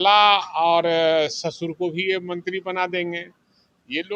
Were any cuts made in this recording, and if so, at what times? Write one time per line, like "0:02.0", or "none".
none